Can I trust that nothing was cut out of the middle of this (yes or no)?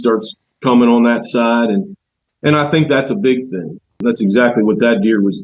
no